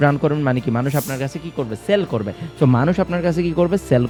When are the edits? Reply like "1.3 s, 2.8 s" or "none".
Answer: none